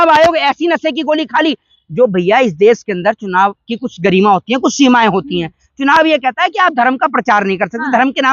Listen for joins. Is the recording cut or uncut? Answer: uncut